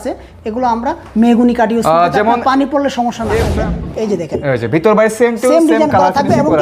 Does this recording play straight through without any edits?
no; 1 cut; at 3.6 s

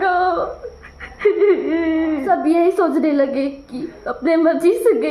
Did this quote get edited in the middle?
yes; 1 cut; at 2.2 s

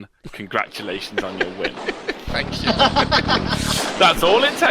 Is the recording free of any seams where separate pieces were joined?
no; 1 cut; at 3.8 s

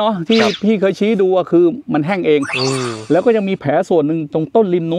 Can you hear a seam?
no; 0 cuts

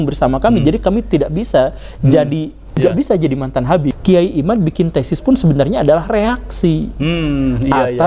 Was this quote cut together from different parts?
yes; 2 cuts; at 2.8 s, 4.0 s

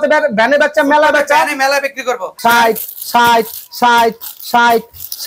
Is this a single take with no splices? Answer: no; 1 cut; at 2.3 s

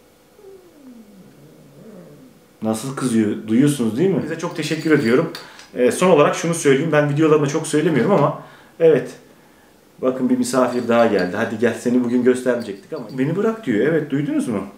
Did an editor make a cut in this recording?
yes; 2 cuts; at 4.5 s, 12.8 s

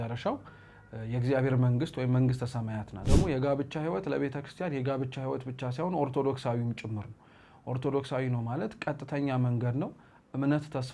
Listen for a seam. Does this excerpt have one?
yes; 1 cut; at 3.1 s

